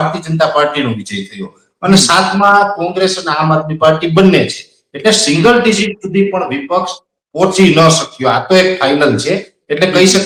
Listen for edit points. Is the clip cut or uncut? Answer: uncut